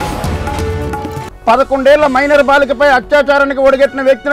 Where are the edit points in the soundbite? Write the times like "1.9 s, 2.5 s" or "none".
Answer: 1.3 s